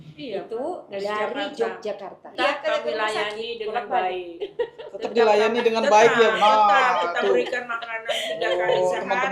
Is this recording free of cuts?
no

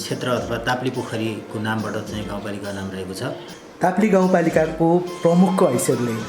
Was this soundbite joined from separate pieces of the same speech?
yes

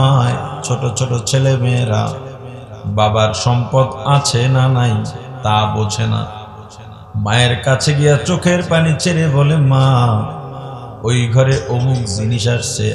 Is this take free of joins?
yes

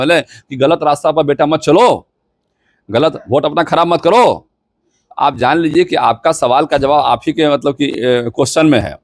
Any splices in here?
no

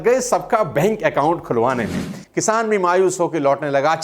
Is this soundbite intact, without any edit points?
no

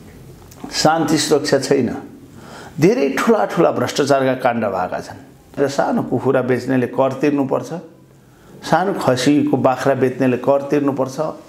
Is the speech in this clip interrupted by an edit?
yes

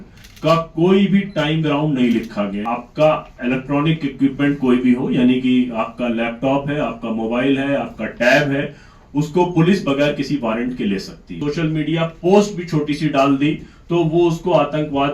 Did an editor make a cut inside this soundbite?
yes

